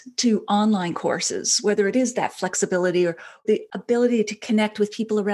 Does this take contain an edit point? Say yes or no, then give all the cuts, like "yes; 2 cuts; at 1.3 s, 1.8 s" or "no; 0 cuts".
yes; 1 cut; at 3.7 s